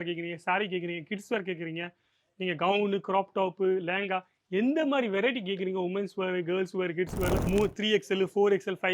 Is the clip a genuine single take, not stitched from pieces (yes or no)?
no